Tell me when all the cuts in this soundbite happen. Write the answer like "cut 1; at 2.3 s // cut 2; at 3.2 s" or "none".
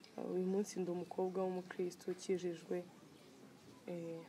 none